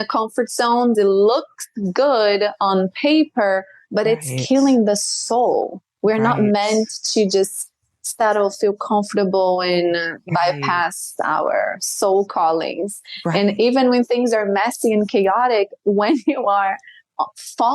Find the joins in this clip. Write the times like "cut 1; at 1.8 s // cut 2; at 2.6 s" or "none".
cut 1; at 1.0 s